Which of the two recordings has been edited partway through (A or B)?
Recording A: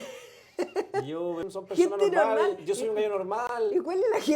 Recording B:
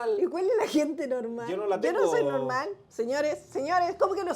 A